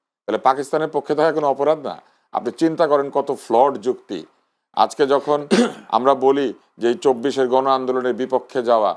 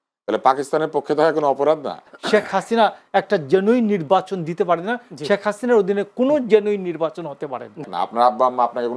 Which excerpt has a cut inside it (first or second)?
second